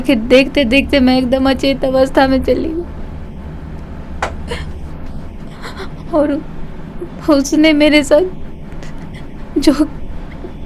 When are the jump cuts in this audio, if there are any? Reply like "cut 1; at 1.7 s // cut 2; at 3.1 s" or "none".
none